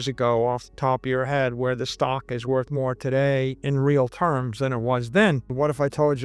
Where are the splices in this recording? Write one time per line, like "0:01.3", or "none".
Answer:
0:03.6
0:05.5